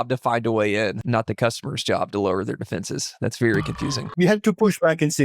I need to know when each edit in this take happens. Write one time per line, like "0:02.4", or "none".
0:01.0
0:04.0